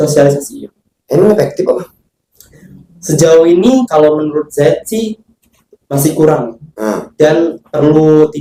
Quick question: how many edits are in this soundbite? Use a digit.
0